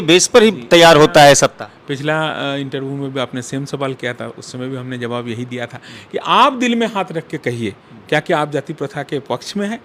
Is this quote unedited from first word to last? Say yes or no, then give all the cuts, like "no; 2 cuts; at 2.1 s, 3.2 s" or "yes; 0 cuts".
yes; 0 cuts